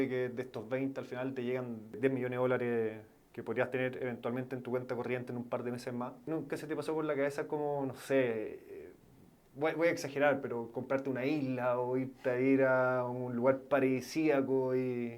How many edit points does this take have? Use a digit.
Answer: 2